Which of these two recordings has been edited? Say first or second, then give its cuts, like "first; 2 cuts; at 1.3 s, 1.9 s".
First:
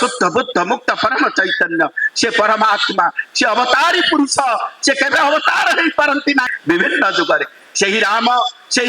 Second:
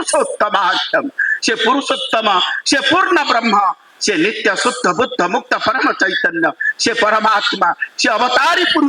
first; 1 cut; at 6.5 s